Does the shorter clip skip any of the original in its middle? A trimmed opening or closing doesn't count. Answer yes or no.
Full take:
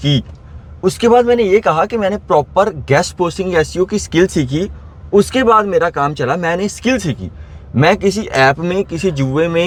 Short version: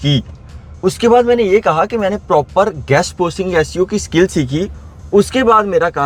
no